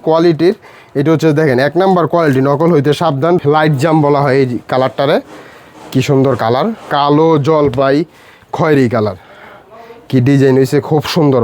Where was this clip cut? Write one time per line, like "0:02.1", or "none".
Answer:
0:03.4
0:06.8